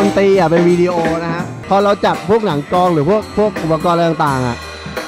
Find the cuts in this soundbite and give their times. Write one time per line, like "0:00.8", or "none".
0:01.5